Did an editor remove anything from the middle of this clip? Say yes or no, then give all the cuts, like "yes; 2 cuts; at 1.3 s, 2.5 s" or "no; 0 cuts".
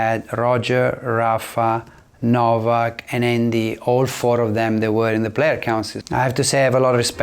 yes; 1 cut; at 6.0 s